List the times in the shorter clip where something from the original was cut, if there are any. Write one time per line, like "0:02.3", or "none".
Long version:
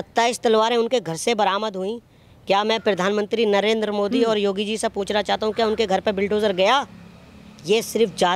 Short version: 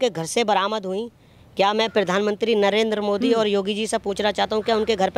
none